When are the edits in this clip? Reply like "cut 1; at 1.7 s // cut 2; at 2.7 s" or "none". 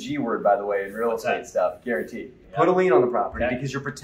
cut 1; at 2.4 s